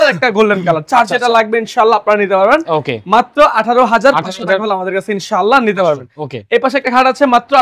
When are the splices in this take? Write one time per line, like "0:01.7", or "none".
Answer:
none